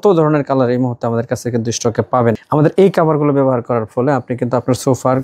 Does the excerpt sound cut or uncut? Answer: cut